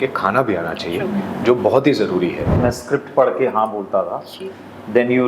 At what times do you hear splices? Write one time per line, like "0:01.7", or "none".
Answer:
0:02.5